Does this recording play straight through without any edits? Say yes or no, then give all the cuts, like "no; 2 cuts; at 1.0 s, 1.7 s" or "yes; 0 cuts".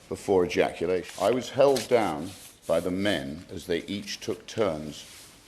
no; 1 cut; at 0.9 s